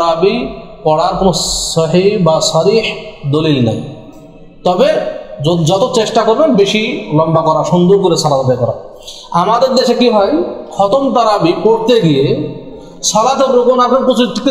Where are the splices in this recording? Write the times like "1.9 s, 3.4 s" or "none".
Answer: none